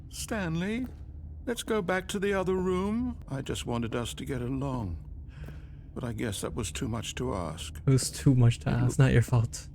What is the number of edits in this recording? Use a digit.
2